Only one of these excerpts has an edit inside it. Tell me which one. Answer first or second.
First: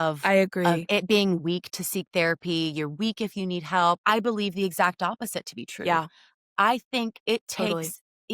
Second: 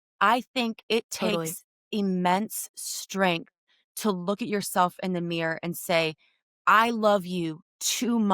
first